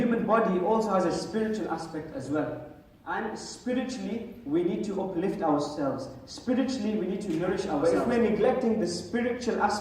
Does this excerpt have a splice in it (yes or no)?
yes